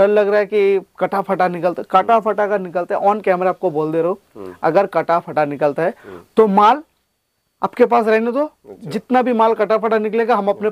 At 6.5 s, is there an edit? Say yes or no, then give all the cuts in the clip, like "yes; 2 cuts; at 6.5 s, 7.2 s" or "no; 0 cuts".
no; 0 cuts